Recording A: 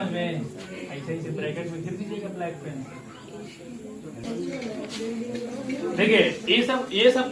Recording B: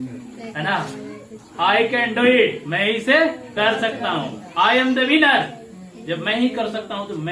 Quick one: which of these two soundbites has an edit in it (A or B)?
A